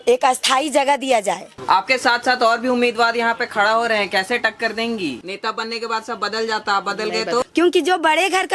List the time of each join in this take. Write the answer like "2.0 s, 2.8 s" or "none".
1.5 s, 5.3 s, 7.5 s